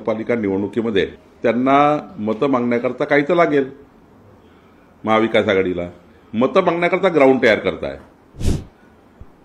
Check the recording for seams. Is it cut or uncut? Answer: cut